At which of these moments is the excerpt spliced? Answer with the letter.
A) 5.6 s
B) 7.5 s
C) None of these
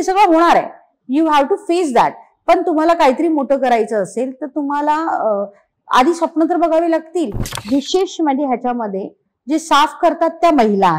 B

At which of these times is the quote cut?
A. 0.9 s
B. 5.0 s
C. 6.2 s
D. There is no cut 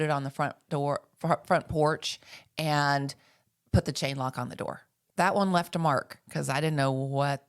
B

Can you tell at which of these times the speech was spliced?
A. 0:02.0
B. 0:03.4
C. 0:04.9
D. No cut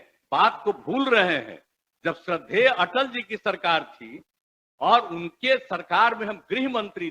D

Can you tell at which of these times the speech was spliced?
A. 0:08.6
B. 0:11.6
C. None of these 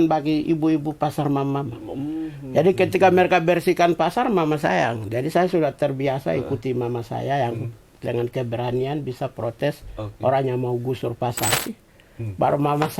B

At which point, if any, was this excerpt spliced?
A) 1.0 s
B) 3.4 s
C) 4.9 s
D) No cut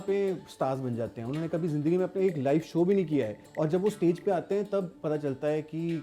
B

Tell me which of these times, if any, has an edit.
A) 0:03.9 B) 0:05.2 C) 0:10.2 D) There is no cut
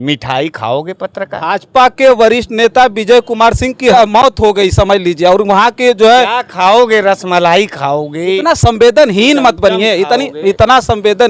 A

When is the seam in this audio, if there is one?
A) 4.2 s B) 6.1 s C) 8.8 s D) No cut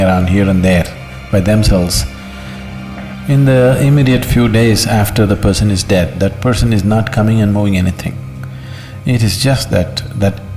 D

